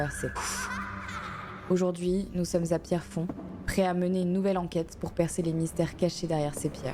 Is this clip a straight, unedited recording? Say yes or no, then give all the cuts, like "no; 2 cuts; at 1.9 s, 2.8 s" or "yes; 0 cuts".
yes; 0 cuts